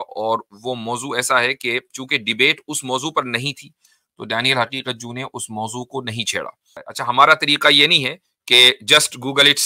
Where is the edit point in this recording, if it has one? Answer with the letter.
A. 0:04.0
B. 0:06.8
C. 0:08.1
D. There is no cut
B